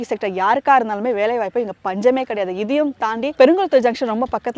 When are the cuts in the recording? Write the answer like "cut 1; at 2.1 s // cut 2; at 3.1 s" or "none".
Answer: none